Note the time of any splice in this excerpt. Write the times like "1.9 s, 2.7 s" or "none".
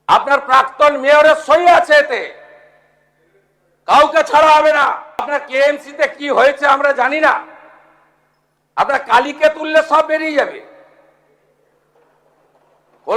5.3 s

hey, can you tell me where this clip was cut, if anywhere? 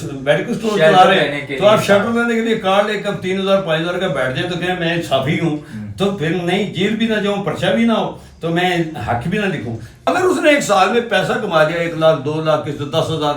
10.1 s

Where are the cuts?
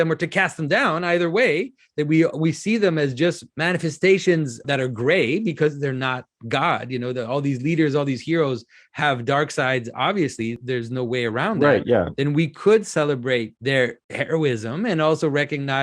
3.5 s, 4.6 s, 10.6 s, 13.8 s

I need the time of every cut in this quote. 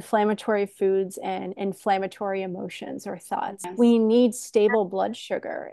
3.6 s

